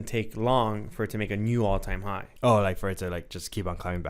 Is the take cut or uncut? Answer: cut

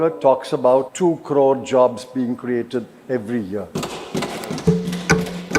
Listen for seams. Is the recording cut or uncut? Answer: cut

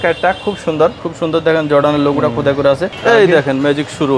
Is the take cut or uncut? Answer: cut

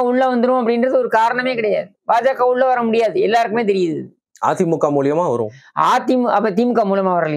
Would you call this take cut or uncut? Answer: uncut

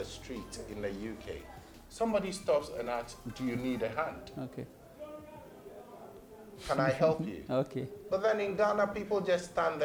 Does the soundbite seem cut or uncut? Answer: uncut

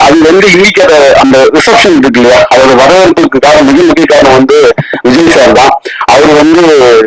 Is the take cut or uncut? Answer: uncut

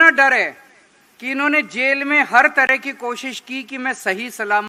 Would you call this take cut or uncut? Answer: uncut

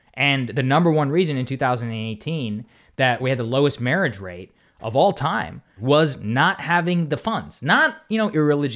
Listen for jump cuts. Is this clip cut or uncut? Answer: cut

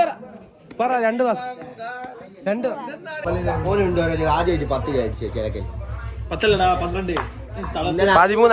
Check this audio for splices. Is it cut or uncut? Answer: cut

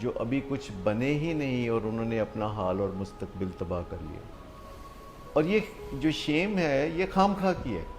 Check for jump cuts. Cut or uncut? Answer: cut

